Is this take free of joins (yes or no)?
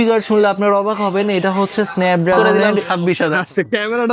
no